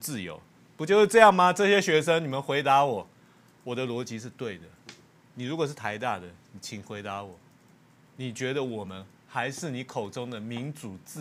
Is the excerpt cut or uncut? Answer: uncut